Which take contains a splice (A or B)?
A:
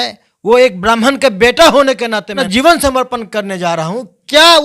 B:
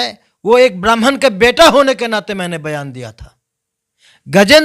A